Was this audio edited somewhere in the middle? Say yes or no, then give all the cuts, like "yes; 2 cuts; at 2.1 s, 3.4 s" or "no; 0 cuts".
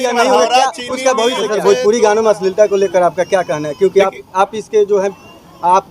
yes; 1 cut; at 1.6 s